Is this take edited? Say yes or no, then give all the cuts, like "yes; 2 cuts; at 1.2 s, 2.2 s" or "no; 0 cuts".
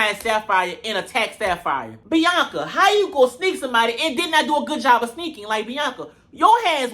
yes; 1 cut; at 1.9 s